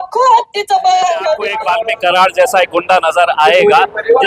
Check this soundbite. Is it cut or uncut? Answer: cut